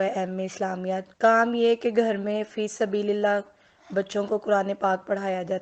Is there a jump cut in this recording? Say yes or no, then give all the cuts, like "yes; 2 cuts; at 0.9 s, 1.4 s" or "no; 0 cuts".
no; 0 cuts